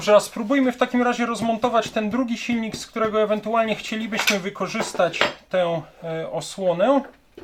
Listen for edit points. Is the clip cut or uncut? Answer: uncut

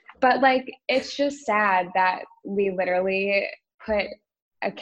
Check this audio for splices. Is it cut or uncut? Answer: cut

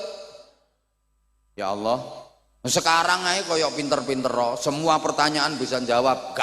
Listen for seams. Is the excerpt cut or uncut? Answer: uncut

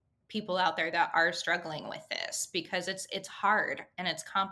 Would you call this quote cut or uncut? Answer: uncut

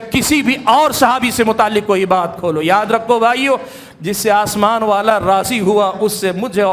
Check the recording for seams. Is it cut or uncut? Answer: uncut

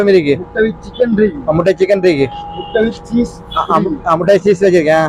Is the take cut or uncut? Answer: uncut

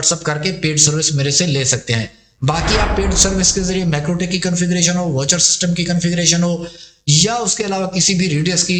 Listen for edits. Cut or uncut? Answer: uncut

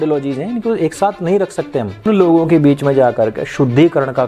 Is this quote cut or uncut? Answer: cut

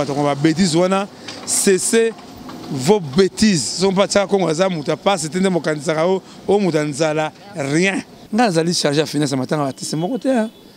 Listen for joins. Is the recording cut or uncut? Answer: cut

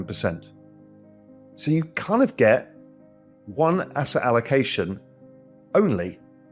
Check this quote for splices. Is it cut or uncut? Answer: uncut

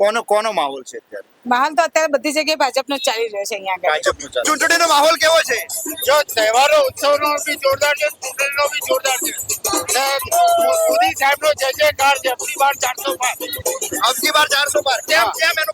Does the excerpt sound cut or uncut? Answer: cut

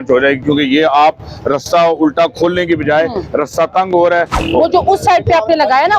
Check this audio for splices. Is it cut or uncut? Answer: cut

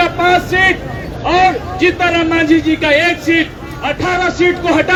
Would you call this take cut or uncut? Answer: uncut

